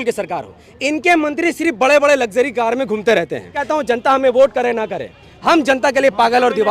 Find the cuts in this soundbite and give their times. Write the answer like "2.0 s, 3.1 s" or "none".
3.7 s